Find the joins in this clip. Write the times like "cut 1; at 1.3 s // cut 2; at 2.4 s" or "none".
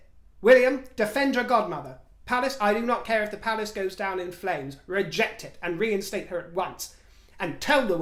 none